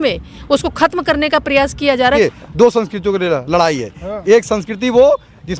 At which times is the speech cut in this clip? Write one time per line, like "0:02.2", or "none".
0:02.2